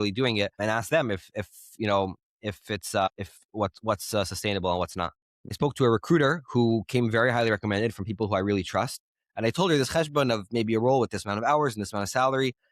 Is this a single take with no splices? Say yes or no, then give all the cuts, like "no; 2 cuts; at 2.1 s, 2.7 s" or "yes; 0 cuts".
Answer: no; 1 cut; at 5.6 s